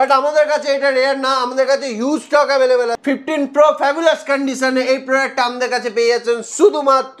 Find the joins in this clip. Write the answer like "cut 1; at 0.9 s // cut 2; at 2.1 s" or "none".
cut 1; at 3.0 s